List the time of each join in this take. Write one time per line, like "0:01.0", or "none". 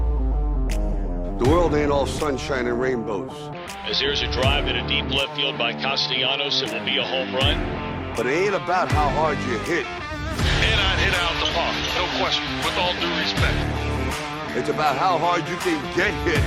none